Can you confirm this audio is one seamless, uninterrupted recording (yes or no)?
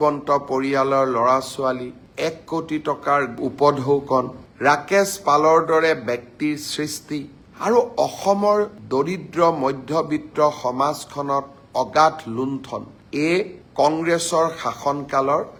yes